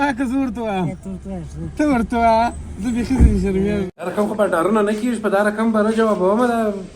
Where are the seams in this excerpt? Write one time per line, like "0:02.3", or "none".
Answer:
0:03.9